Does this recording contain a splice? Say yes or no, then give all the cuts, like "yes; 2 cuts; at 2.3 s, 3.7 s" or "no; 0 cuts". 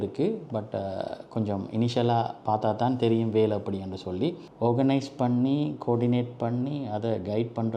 no; 0 cuts